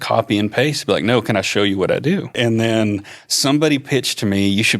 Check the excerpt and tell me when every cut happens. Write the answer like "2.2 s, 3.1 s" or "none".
2.3 s